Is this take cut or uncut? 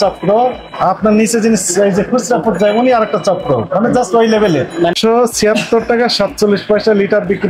cut